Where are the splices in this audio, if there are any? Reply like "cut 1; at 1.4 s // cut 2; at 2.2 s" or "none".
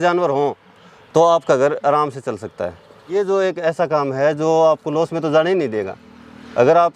cut 1; at 3.2 s